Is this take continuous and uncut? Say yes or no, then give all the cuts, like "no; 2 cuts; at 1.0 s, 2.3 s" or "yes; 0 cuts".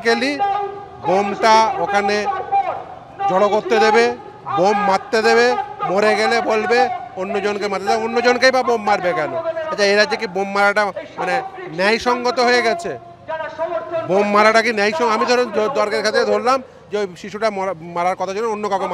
yes; 0 cuts